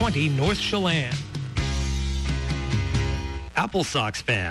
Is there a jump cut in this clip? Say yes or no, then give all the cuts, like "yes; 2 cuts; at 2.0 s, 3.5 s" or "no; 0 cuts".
yes; 1 cut; at 3.4 s